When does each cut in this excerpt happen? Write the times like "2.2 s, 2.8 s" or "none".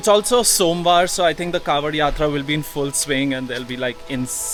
none